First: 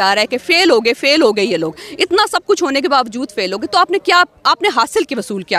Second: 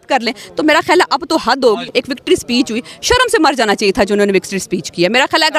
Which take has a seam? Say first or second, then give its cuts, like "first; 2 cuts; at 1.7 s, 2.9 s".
second; 1 cut; at 1.9 s